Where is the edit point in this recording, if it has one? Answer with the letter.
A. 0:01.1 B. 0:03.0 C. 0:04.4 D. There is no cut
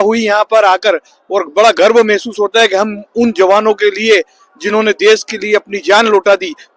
D